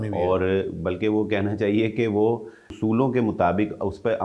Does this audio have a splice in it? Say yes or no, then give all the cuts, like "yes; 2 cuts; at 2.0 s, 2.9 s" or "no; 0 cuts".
yes; 1 cut; at 2.6 s